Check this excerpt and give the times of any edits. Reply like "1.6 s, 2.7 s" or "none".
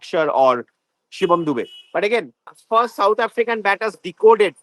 2.5 s